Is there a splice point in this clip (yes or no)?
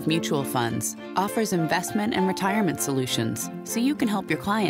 no